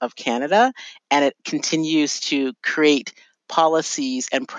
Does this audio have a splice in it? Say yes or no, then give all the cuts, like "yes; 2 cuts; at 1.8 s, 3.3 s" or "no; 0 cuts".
no; 0 cuts